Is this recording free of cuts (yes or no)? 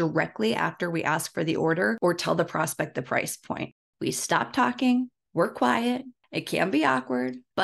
no